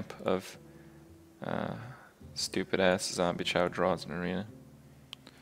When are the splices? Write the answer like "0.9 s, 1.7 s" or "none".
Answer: none